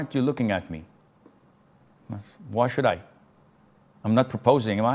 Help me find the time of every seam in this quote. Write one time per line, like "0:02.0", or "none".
none